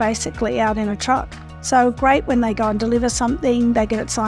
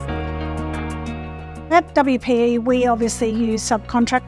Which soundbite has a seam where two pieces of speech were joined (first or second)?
second